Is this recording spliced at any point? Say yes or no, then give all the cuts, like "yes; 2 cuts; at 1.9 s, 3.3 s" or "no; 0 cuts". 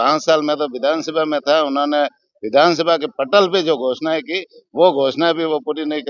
no; 0 cuts